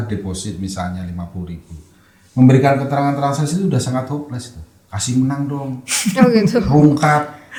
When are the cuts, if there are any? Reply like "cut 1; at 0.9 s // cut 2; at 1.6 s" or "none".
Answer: none